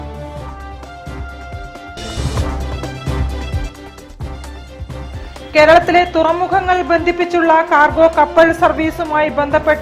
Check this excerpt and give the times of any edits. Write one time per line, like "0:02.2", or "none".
0:04.8